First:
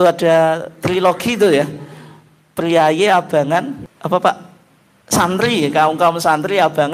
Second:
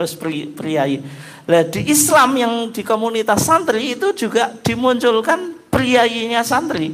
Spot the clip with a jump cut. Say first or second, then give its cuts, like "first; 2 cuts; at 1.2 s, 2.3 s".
first; 1 cut; at 3.9 s